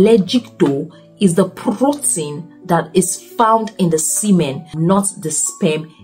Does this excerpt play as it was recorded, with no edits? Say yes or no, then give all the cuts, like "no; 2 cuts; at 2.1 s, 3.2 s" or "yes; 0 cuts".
no; 1 cut; at 4.7 s